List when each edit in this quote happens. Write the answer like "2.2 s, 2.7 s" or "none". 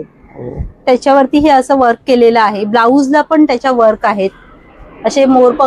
none